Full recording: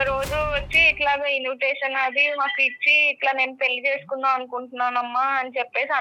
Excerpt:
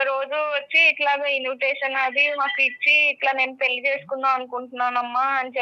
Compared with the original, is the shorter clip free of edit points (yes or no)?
yes